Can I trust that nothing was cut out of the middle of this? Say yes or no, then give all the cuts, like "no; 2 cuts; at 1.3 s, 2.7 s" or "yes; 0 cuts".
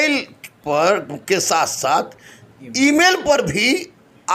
yes; 0 cuts